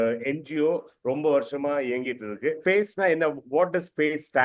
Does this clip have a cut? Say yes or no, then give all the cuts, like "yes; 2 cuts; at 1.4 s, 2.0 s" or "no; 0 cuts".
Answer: yes; 1 cut; at 2.5 s